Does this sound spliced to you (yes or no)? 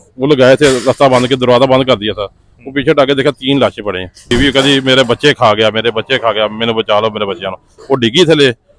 yes